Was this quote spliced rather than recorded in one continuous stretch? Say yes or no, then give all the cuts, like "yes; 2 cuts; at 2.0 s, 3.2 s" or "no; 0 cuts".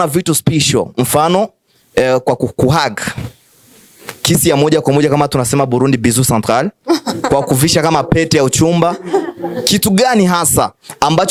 no; 0 cuts